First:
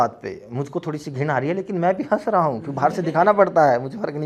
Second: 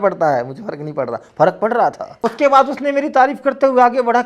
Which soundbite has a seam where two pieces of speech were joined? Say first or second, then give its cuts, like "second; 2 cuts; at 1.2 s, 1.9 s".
second; 1 cut; at 2.1 s